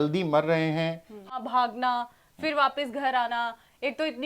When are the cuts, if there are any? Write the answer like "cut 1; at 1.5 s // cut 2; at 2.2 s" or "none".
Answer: cut 1; at 1.3 s